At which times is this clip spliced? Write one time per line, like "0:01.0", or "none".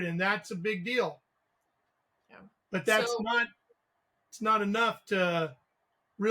none

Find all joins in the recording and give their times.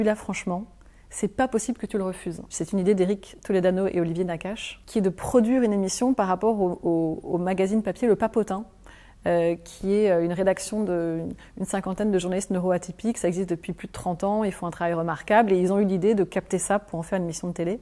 0:02.6

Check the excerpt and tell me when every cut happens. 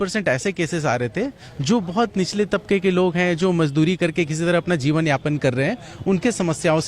none

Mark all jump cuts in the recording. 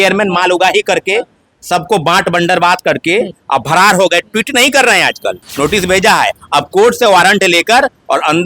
0:05.5

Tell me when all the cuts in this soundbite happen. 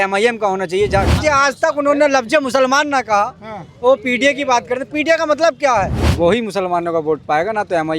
0:01.1
0:06.0

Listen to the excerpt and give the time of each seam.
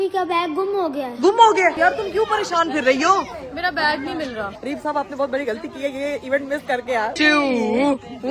0:01.8
0:04.5
0:07.1

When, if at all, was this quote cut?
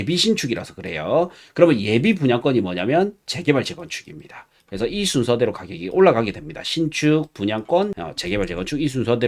0:08.0

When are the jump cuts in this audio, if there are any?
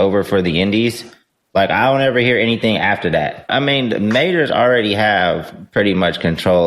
0:03.5

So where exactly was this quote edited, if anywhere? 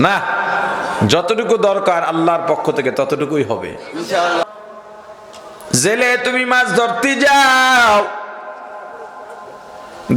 0:04.4

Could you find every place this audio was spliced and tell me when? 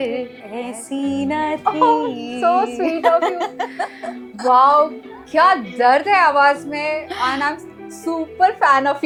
none

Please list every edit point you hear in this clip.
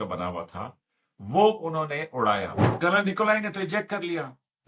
0:02.6

